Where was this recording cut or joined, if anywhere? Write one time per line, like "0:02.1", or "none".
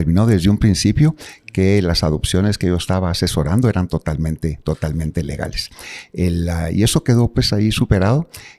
none

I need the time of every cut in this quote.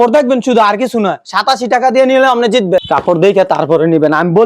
0:02.8

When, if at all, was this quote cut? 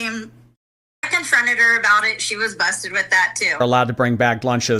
0:01.1
0:03.6

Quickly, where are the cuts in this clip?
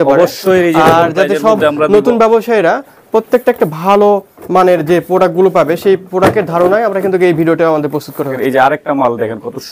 none

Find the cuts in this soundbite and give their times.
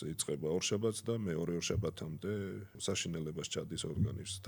0:02.7

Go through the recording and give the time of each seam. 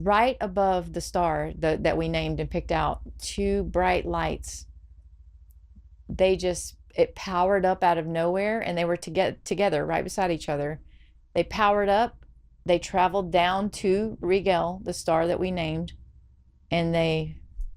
none

